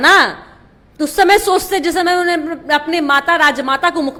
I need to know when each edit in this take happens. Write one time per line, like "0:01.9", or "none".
none